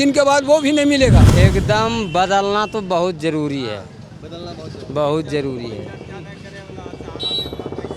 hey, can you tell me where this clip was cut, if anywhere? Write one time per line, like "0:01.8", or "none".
0:01.2